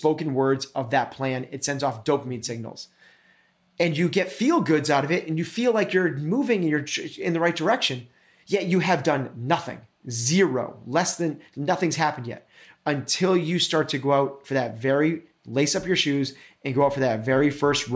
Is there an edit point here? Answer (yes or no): no